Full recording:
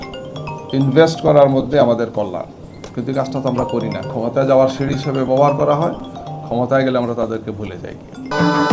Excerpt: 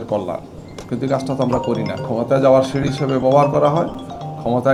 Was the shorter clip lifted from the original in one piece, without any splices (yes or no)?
yes